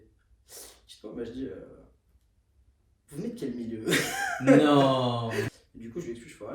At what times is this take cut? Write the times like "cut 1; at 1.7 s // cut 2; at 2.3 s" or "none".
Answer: cut 1; at 5.6 s